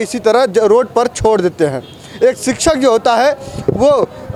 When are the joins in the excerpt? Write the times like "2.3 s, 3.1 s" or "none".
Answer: none